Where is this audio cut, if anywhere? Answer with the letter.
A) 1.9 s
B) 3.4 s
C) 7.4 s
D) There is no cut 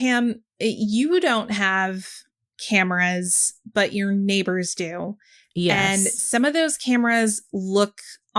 D